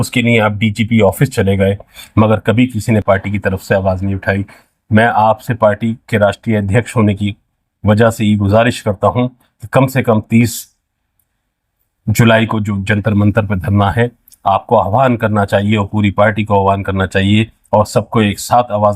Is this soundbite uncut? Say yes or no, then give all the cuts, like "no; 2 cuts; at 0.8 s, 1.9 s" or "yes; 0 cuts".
no; 1 cut; at 1.9 s